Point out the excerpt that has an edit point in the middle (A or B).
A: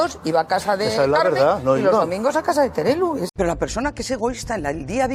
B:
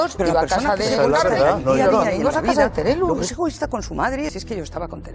A